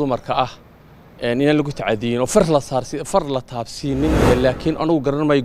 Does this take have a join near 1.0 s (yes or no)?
no